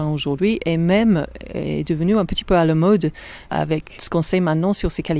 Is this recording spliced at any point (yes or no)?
yes